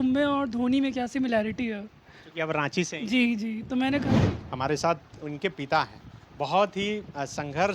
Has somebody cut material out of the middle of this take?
yes; 1 cut; at 4.2 s

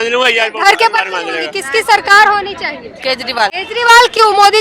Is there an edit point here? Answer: yes; 2 cuts; at 1.5 s, 3.6 s

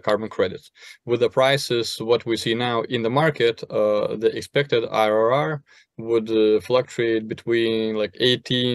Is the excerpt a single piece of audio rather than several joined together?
yes; 0 cuts

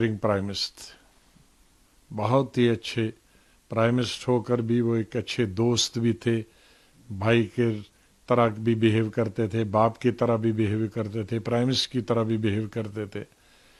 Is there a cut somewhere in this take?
no; 0 cuts

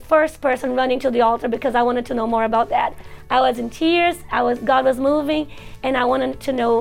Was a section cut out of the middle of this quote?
no; 0 cuts

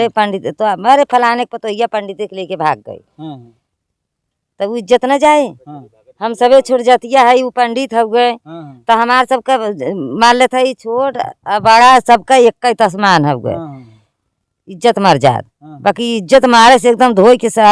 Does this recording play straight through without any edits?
yes; 0 cuts

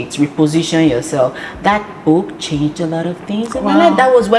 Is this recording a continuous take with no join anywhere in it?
yes; 0 cuts

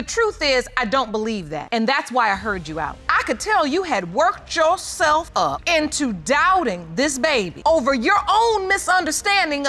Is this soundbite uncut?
yes; 0 cuts

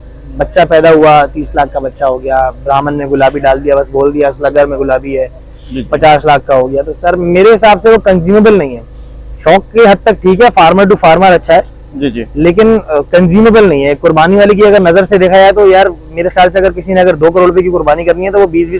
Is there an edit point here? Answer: no; 0 cuts

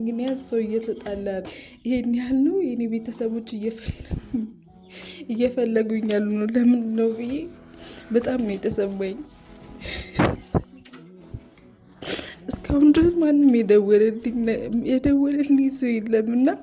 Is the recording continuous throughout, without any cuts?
no; 1 cut; at 1.5 s

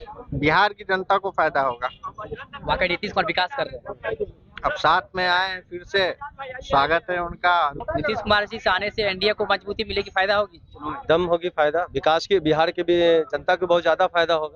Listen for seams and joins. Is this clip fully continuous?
no; 1 cut; at 7.8 s

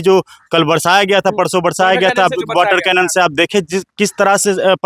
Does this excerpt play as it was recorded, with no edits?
yes; 0 cuts

